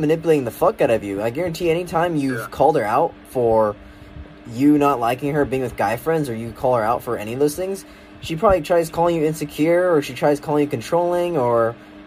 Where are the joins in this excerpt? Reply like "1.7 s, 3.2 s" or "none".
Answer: none